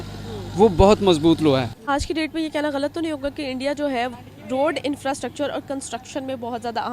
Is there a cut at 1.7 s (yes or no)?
yes